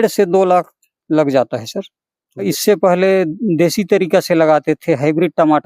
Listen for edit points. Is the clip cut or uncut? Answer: cut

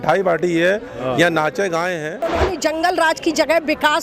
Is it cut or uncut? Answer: cut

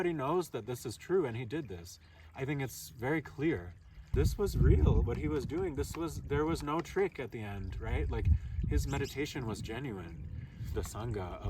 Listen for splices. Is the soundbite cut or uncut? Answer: cut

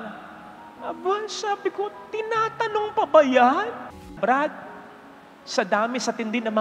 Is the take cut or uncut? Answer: cut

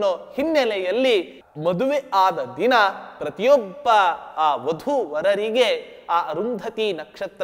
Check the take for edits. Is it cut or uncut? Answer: cut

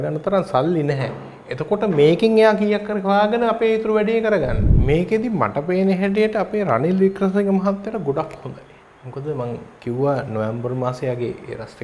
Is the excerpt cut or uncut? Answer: cut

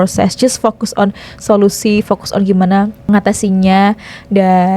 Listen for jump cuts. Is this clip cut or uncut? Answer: cut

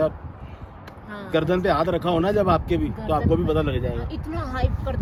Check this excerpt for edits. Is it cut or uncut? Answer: uncut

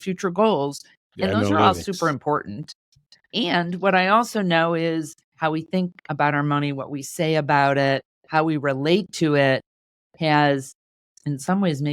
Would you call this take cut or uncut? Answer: uncut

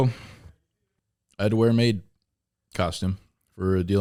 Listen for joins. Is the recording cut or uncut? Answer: uncut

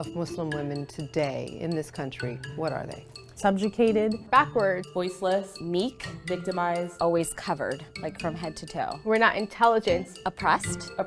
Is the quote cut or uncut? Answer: cut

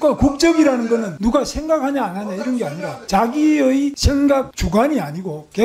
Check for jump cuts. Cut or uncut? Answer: cut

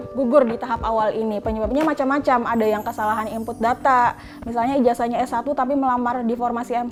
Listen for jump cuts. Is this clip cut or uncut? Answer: uncut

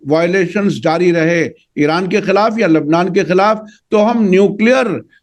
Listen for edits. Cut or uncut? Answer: uncut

